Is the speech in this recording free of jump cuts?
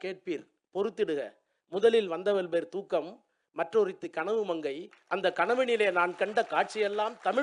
yes; 0 cuts

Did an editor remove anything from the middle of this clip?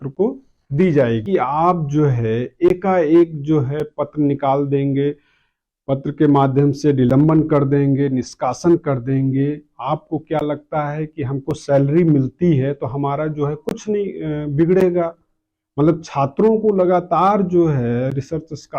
yes; 1 cut; at 1.2 s

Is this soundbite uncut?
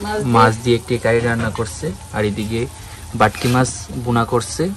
yes; 0 cuts

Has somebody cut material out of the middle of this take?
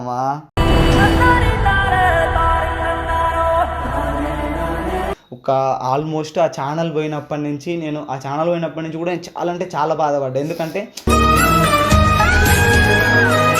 yes; 1 cut; at 5.2 s

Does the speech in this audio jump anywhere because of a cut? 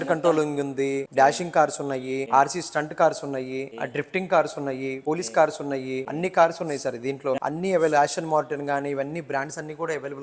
yes; 6 cuts; at 1.1 s, 2.2 s, 3.7 s, 5.0 s, 6.1 s, 7.4 s

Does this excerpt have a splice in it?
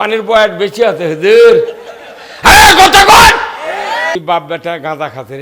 yes; 1 cut; at 4.2 s

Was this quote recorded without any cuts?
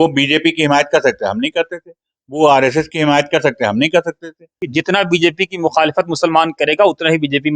no; 1 cut; at 4.6 s

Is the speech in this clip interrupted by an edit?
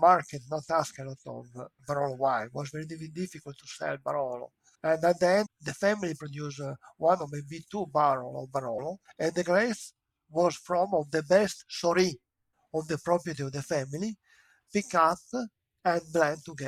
no; 0 cuts

